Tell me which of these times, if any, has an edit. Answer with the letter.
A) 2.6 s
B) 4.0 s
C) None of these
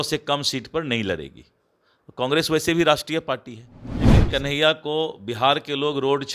B